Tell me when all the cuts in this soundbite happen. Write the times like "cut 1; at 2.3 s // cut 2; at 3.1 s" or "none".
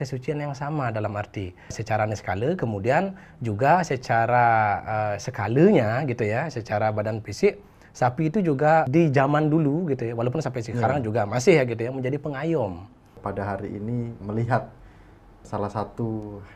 cut 1; at 1.8 s // cut 2; at 8.9 s // cut 3; at 13.1 s // cut 4; at 14.2 s // cut 5; at 15.4 s